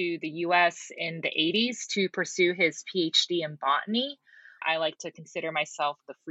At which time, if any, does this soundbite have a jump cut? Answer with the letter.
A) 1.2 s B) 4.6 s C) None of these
B